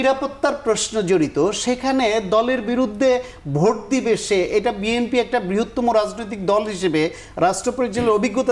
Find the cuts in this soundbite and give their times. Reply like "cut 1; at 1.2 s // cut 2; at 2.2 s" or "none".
none